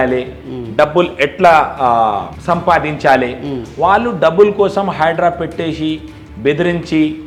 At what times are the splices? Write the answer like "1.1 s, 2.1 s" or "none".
none